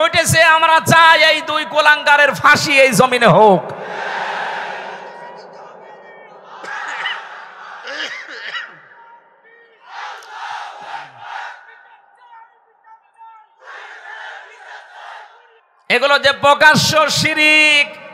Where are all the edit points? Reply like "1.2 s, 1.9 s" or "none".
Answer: 15.7 s